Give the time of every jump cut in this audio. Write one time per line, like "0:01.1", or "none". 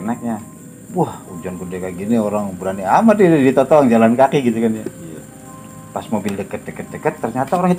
none